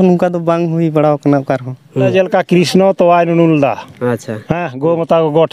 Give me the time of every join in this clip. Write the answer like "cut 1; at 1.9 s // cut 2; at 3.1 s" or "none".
cut 1; at 2.1 s